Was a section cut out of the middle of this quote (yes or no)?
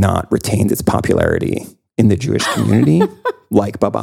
no